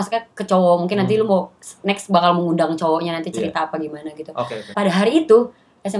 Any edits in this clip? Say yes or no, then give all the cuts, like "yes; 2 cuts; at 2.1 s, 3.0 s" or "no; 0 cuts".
yes; 1 cut; at 4.7 s